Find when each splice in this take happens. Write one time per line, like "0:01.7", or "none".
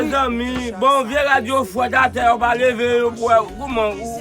none